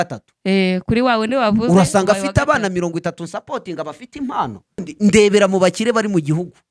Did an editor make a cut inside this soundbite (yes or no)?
yes